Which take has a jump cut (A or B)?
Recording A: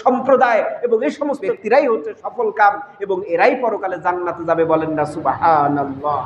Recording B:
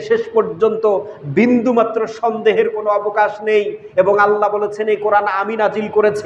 A